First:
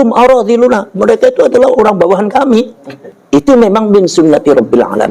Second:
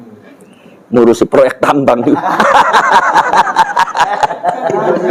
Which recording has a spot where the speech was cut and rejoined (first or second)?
first